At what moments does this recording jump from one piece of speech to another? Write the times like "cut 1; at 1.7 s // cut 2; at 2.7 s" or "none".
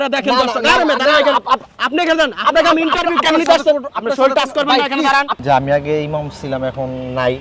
cut 1; at 5.3 s

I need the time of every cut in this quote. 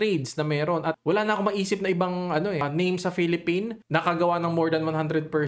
cut 1; at 2.6 s // cut 2; at 3.8 s

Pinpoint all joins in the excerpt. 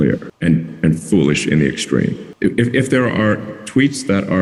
none

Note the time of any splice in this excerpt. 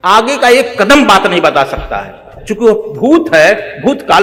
none

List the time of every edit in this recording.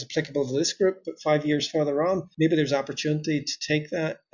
cut 1; at 2.3 s

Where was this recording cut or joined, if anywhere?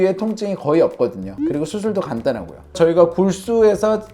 cut 1; at 2.6 s

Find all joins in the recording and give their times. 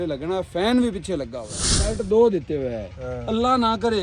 cut 1; at 1.8 s

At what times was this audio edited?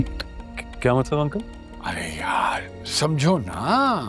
cut 1; at 1.6 s

